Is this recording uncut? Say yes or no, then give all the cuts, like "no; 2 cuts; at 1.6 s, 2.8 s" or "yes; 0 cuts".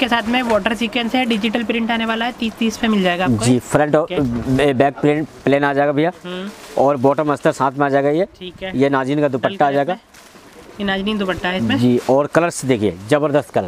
yes; 0 cuts